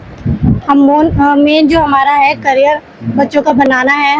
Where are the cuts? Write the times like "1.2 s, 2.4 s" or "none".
none